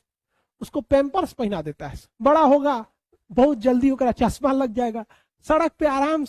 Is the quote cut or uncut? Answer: cut